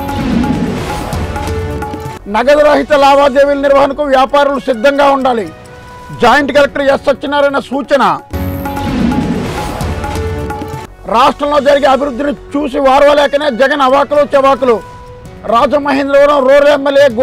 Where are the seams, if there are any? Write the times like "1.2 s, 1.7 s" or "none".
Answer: none